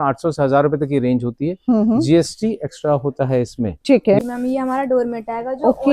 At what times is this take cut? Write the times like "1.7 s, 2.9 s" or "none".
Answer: 4.2 s

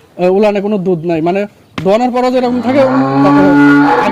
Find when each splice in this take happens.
none

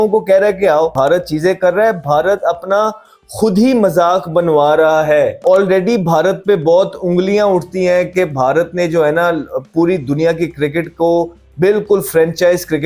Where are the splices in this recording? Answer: 0.9 s, 5.4 s

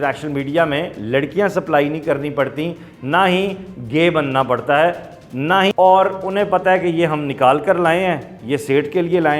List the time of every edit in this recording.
5.7 s

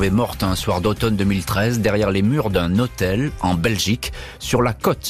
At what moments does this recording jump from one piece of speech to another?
none

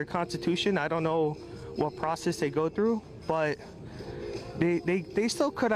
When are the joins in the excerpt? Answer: none

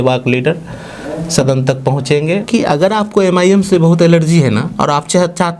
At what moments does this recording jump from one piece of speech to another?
2.4 s

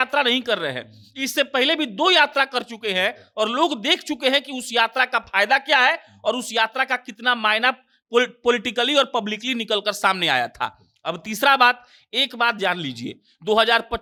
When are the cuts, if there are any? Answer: none

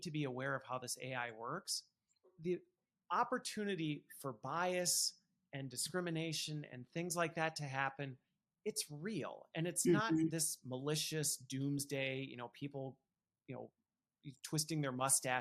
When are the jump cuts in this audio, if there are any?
2.3 s

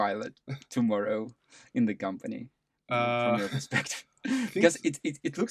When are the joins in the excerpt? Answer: none

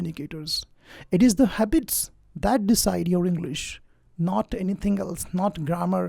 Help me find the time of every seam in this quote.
none

